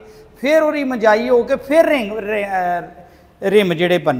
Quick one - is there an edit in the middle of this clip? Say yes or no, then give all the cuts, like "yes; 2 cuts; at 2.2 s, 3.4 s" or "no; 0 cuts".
no; 0 cuts